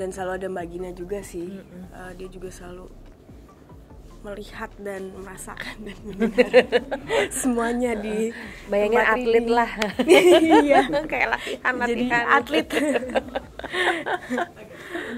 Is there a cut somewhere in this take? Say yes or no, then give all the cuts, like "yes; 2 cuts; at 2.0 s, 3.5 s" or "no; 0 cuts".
no; 0 cuts